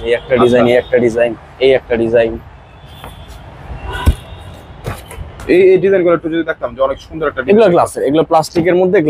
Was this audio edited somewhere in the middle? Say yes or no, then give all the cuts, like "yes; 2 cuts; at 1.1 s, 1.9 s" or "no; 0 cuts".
no; 0 cuts